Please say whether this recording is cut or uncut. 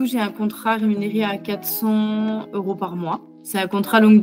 cut